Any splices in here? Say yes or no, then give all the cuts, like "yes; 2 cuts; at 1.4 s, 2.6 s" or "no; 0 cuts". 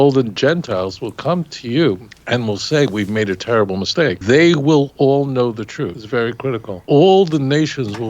yes; 4 cuts; at 2.1 s, 4.2 s, 6.0 s, 6.7 s